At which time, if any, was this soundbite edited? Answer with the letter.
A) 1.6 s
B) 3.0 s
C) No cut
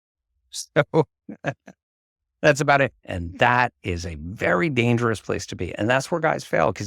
B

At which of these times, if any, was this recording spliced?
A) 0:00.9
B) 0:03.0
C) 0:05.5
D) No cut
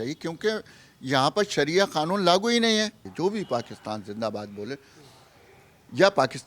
B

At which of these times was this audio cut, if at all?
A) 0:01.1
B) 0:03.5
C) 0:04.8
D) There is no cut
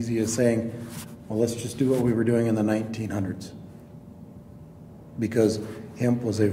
D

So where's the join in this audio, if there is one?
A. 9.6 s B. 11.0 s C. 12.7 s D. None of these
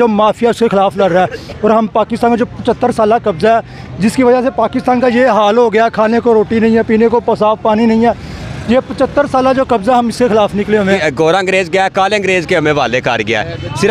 B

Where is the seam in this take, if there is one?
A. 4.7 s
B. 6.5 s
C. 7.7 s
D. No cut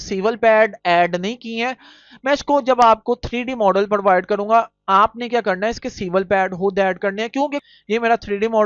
C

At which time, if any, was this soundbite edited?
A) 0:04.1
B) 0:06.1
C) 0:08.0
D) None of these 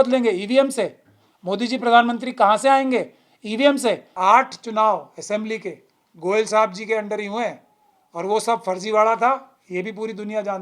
A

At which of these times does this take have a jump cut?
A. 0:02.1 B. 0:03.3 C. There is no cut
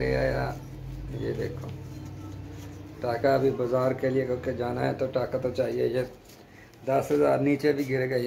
C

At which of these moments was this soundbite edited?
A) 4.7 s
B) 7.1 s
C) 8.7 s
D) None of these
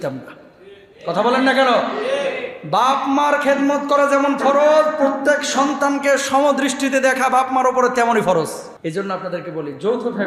C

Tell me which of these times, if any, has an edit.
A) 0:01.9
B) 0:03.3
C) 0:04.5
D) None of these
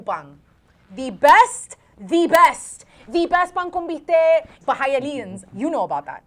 C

